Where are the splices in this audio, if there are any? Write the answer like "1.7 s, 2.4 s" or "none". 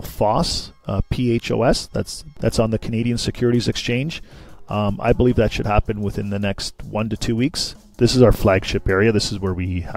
2.2 s, 7.8 s